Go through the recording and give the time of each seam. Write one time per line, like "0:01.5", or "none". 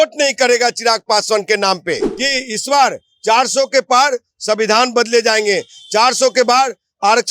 0:02.2